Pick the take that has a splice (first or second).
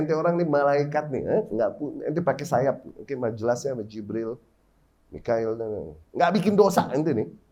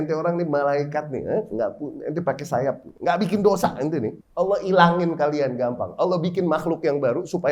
second